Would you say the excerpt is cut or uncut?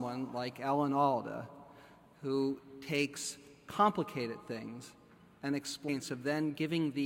uncut